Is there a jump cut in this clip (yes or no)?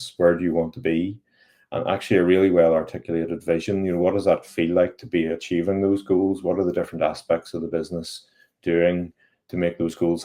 no